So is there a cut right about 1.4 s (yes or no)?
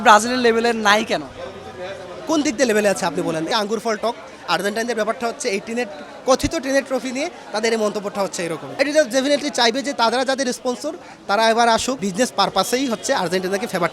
no